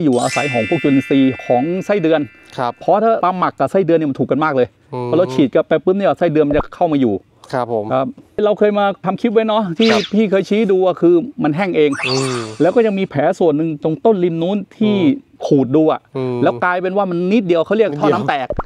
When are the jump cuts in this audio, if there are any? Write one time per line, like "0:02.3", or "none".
0:08.3